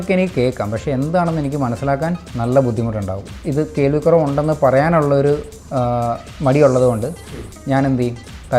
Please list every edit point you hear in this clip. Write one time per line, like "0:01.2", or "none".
0:03.3